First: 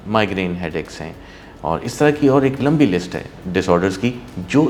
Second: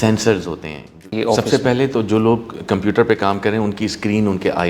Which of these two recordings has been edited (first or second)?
second